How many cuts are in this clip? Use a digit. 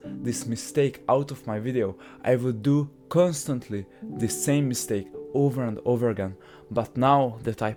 0